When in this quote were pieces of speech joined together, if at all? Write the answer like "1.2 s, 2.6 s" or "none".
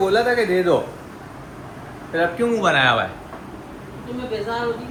none